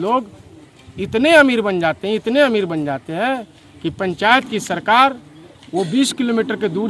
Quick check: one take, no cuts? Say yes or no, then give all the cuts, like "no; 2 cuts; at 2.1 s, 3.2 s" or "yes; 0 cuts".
yes; 0 cuts